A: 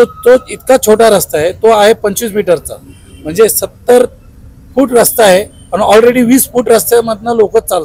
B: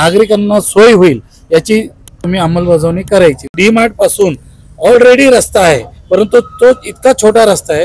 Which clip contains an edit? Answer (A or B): B